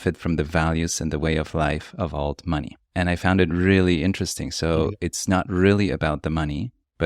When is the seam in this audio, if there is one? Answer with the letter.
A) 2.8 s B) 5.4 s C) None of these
A